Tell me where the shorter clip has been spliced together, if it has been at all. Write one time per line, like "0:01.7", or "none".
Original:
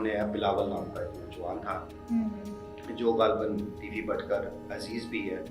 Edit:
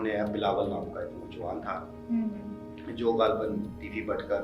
none